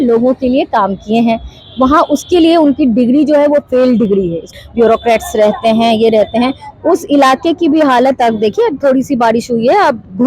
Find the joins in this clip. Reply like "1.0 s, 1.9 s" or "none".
4.5 s